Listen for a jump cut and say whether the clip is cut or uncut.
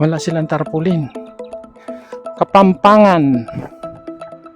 cut